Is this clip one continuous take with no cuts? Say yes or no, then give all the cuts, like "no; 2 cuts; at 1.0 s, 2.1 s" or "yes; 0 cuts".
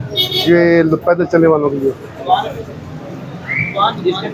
yes; 0 cuts